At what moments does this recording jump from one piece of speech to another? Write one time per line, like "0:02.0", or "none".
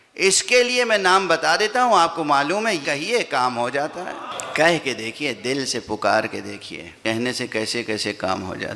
0:02.8
0:04.3
0:07.0